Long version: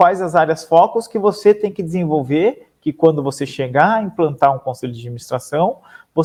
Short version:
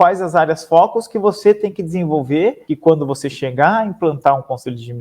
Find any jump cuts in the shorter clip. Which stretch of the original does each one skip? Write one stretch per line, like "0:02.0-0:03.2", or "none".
0:02.7-0:02.8